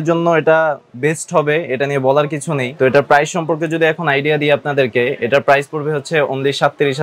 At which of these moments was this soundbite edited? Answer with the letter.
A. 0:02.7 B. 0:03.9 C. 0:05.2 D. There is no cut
A